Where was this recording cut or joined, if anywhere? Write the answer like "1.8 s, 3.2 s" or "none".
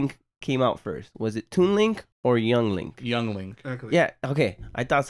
2.1 s